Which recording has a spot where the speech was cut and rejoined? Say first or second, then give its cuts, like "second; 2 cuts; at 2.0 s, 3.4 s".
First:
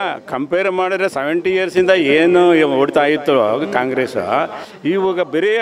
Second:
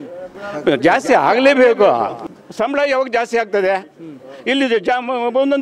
second; 1 cut; at 2.3 s